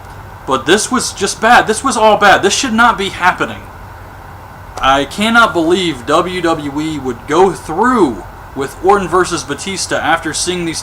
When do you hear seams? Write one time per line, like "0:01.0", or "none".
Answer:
0:07.4

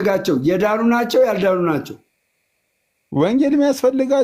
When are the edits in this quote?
none

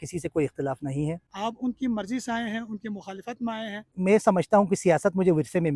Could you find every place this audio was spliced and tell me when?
0:01.3
0:03.9

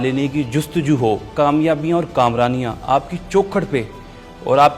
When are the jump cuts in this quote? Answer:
0:01.3

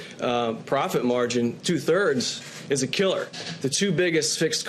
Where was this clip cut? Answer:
0:03.4

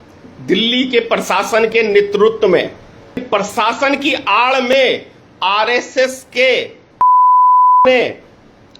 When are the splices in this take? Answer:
0:03.2

